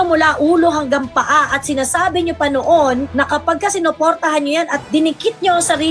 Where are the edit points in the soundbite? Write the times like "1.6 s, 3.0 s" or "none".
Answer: none